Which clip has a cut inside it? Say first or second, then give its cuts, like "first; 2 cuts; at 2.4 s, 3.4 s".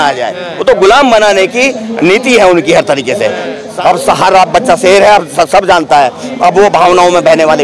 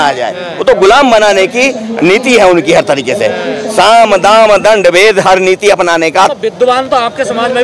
first; 1 cut; at 3.6 s